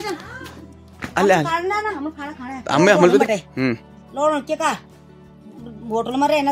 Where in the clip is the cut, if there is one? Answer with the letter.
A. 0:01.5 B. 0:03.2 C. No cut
B